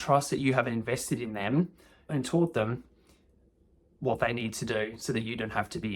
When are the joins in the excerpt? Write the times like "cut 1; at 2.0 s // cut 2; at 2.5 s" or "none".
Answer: cut 1; at 2.1 s